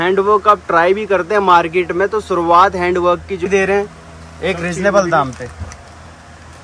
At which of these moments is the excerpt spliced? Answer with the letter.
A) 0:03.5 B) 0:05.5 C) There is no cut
A